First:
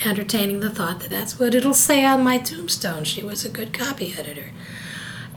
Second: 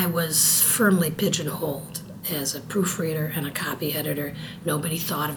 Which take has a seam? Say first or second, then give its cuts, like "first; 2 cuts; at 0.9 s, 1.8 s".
first; 1 cut; at 1.2 s